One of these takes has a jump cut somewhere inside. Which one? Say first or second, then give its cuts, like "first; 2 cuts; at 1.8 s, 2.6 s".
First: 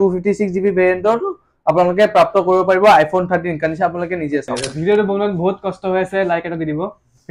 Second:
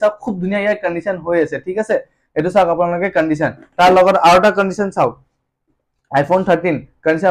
first; 1 cut; at 4.8 s